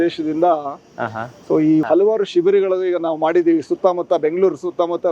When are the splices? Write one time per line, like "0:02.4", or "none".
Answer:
0:01.8